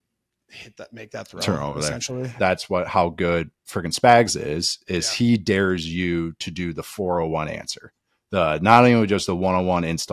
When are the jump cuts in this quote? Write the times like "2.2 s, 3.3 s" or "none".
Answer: 2.3 s